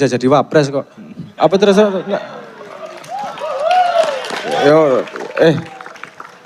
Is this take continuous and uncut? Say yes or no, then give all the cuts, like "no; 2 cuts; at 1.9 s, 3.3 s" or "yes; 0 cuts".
yes; 0 cuts